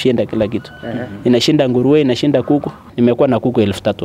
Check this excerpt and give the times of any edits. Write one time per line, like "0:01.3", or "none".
0:02.9

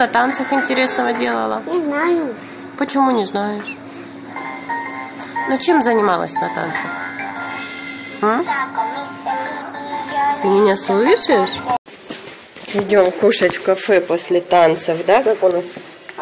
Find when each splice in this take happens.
0:11.8

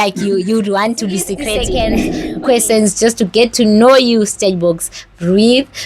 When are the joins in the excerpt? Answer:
0:01.9

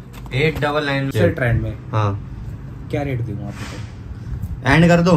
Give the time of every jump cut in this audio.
0:01.1

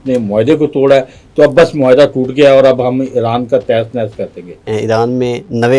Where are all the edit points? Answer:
0:04.6

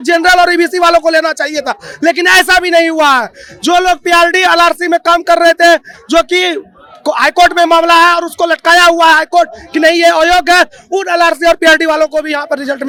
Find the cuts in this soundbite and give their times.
none

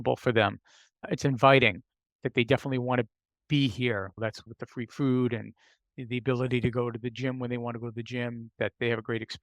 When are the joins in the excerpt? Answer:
0:01.1
0:04.4

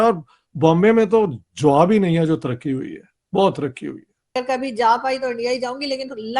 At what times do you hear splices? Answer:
0:04.2

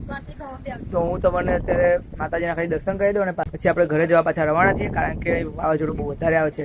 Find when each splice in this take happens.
0:03.5

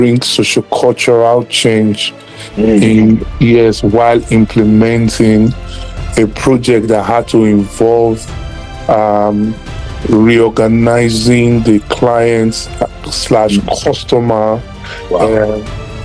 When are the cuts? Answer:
none

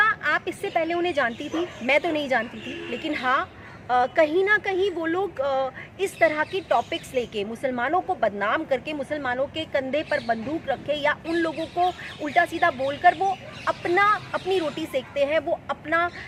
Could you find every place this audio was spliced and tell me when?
none

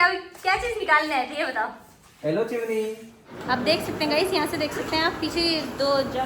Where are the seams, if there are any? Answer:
0:03.3

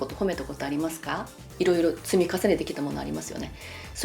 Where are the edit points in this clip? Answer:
0:01.4

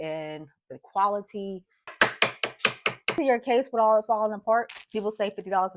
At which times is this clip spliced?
0:01.9
0:03.1
0:04.7

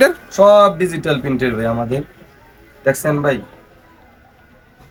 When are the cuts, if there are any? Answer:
none

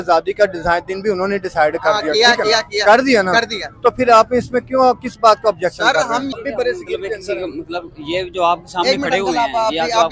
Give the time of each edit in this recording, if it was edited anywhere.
0:06.3

